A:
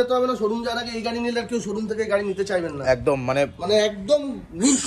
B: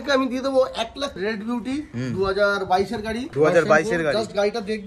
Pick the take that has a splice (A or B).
B